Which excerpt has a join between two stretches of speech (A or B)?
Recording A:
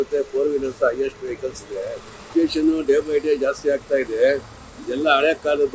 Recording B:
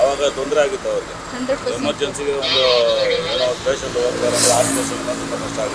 A